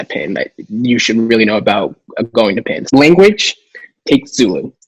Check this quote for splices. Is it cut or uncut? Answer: cut